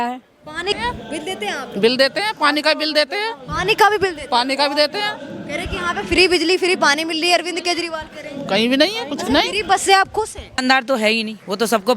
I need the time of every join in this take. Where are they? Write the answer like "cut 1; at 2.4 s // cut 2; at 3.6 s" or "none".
cut 1; at 0.7 s // cut 2; at 10.6 s